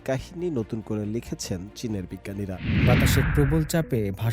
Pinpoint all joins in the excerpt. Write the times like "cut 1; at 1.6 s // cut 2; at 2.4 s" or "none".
cut 1; at 2.7 s